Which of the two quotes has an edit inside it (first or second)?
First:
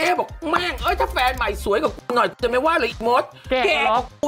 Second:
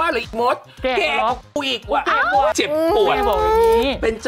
second